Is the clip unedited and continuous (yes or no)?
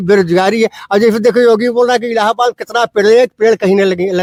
yes